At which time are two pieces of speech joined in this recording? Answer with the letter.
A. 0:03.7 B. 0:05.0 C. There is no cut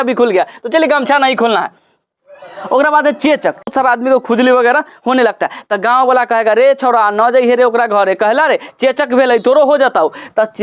A